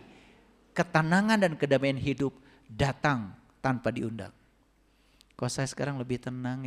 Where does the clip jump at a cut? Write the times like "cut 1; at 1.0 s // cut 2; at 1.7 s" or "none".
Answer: none